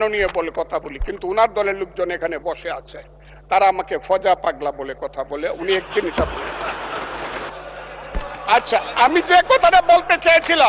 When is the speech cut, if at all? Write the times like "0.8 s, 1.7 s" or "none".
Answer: 7.5 s